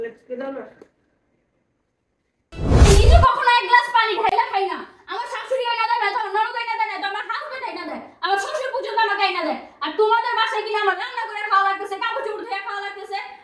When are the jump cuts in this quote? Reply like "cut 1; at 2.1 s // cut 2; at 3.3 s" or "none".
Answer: cut 1; at 2.7 s